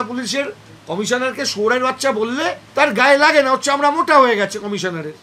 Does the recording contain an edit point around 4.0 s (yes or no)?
no